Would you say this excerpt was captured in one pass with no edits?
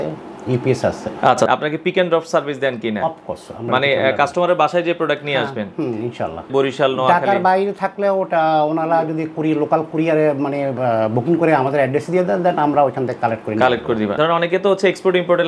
no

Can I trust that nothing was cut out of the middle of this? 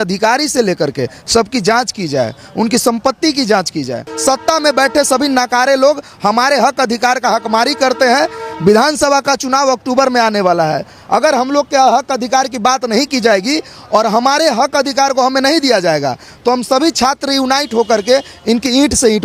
no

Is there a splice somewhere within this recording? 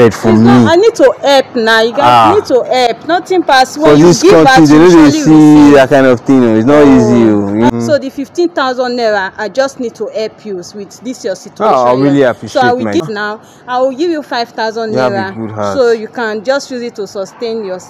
yes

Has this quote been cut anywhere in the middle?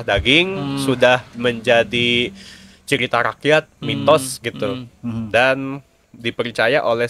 no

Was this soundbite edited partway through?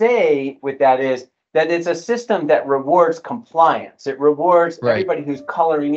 no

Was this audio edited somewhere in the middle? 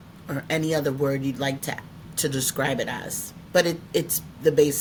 no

